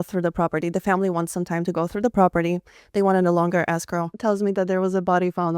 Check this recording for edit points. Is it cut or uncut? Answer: cut